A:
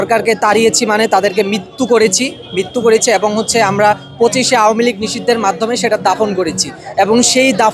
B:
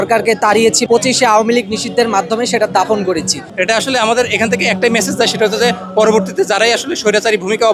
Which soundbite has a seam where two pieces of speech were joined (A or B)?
B